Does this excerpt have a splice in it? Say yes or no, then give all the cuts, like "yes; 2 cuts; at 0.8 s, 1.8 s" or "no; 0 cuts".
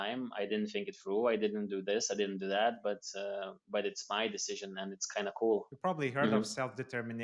yes; 1 cut; at 5.7 s